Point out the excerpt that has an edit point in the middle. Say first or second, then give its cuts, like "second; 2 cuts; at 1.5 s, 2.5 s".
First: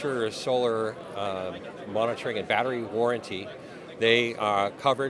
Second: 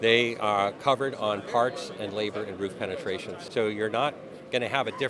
second; 1 cut; at 3.4 s